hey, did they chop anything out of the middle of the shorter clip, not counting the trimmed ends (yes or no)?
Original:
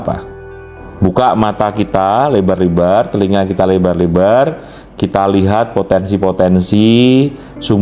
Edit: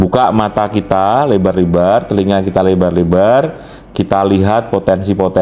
no